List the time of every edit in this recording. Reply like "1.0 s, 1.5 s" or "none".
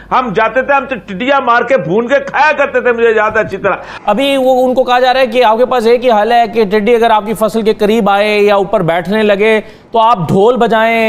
3.9 s